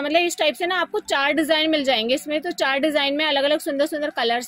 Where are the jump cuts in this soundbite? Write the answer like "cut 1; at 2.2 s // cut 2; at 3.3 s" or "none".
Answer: none

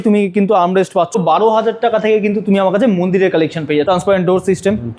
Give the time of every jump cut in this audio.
cut 1; at 1.1 s // cut 2; at 3.8 s

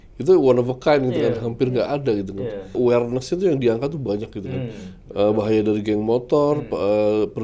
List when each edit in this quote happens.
cut 1; at 2.8 s

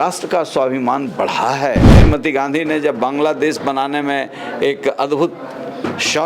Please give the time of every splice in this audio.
cut 1; at 2.0 s

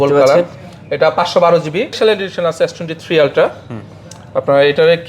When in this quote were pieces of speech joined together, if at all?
cut 1; at 2.0 s

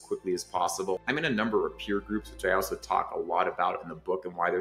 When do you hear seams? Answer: cut 1; at 1.0 s

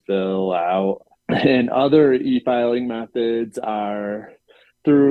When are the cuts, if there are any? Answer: cut 1; at 1.1 s

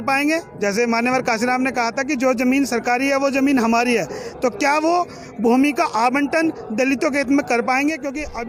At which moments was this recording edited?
none

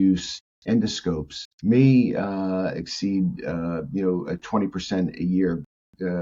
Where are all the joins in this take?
none

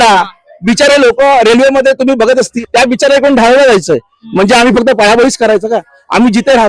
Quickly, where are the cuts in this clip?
cut 1; at 2.5 s

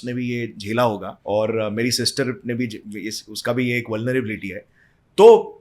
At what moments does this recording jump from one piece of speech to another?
cut 1; at 1.1 s

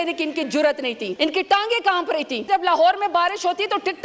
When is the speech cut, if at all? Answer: cut 1; at 1.1 s // cut 2; at 2.5 s

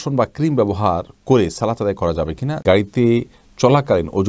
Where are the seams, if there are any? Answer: cut 1; at 2.6 s

